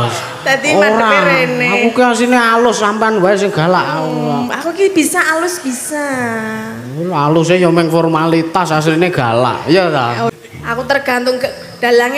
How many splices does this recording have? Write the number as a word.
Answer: one